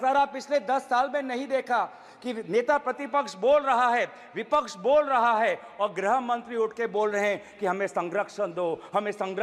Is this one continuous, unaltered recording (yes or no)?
yes